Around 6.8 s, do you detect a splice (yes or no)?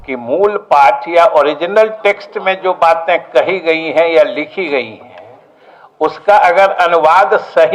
no